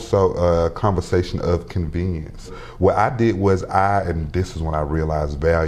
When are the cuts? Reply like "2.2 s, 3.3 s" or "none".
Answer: 2.6 s